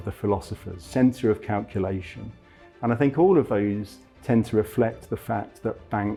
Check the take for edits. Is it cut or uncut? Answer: uncut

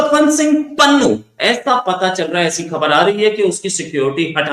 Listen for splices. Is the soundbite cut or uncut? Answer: cut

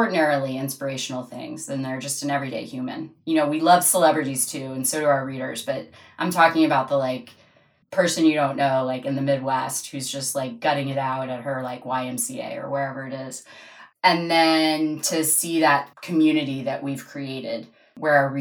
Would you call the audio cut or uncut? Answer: uncut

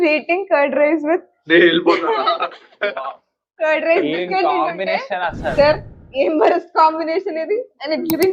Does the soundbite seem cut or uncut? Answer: uncut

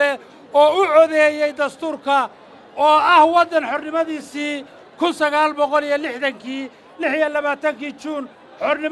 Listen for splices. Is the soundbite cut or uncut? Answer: uncut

